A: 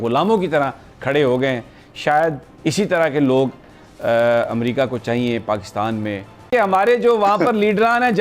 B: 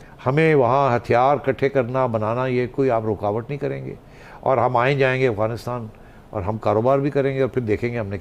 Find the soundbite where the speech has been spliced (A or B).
A